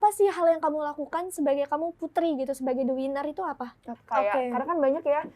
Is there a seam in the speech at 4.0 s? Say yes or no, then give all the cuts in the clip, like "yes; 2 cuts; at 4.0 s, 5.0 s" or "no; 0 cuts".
yes; 1 cut; at 4.0 s